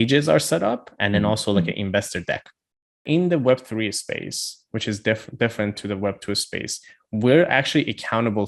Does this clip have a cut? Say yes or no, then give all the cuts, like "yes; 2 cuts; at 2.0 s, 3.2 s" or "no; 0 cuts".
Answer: yes; 1 cut; at 3.0 s